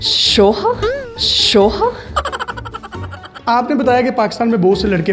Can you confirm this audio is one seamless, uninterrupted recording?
no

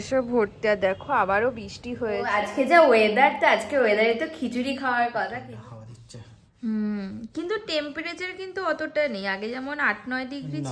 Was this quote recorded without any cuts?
no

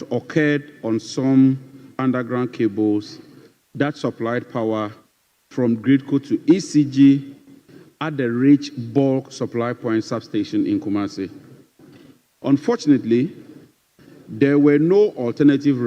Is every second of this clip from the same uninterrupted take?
yes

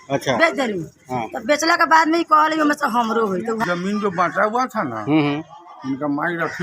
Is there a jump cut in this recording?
yes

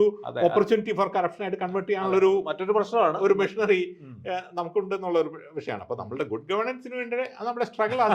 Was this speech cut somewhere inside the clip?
no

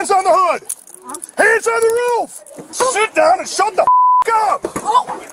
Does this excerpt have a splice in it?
yes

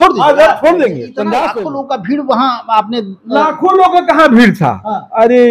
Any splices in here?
yes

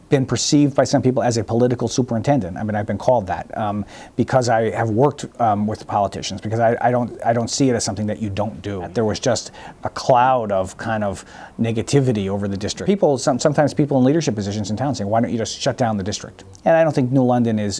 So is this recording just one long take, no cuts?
no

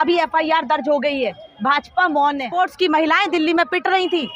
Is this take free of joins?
no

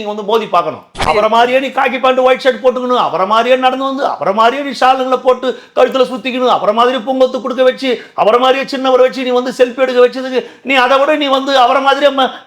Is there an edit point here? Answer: yes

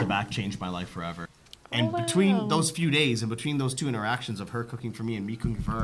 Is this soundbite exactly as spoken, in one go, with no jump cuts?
no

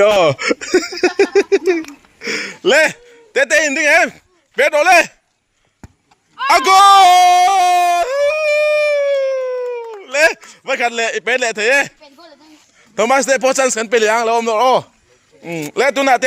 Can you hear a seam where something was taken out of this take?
no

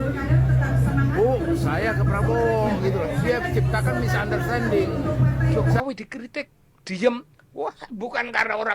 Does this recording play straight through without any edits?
no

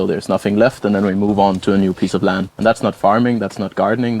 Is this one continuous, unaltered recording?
no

